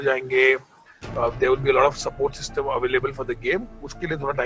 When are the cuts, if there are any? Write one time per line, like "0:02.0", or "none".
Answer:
none